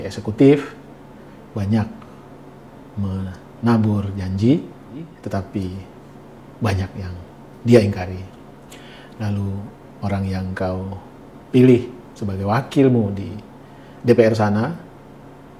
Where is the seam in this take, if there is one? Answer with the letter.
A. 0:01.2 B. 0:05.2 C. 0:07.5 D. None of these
B